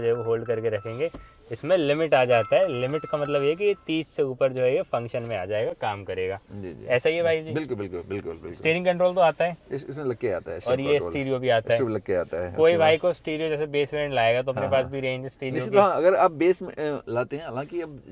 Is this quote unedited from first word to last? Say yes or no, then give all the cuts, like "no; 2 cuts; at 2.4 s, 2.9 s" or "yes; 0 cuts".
yes; 0 cuts